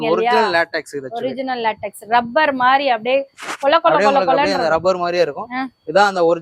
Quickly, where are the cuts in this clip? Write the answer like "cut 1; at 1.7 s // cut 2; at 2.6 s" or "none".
none